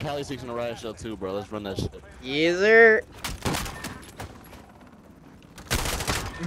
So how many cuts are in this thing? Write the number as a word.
one